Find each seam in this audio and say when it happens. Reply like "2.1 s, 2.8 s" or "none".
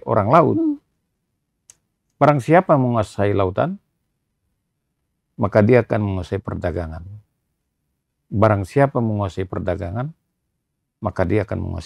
none